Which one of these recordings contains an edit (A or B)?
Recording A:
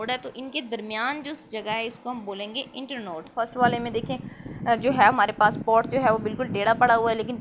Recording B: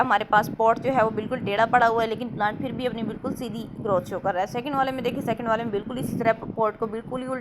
A